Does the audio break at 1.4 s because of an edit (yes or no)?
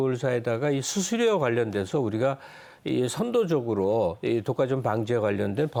no